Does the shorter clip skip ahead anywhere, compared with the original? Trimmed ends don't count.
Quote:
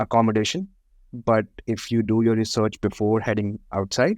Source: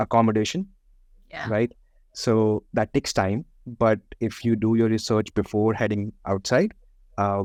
yes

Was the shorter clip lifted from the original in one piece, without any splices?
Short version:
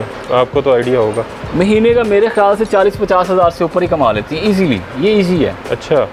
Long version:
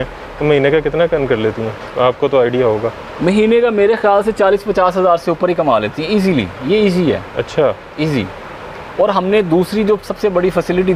yes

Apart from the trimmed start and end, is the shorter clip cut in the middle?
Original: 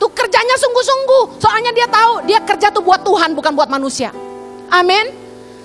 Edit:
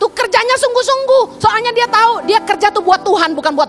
no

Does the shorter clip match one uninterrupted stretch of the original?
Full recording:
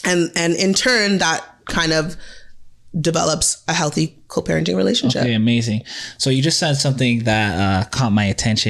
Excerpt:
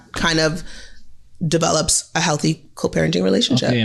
yes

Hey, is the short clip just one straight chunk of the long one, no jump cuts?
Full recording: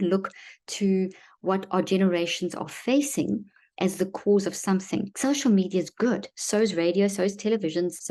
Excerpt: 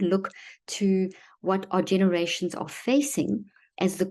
yes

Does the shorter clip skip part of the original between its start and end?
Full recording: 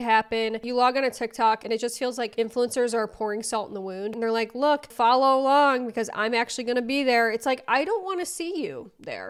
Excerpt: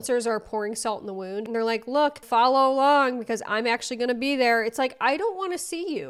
no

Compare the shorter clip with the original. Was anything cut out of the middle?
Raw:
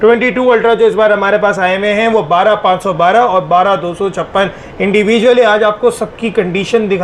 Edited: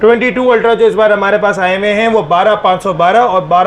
no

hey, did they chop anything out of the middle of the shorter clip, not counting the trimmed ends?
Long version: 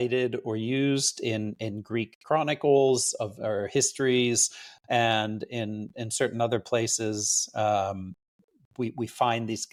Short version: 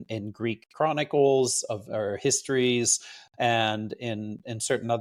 no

